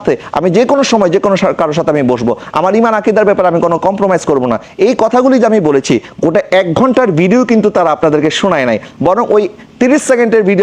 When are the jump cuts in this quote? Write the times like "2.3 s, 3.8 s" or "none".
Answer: none